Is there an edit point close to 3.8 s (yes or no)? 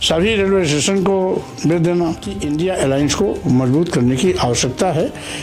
no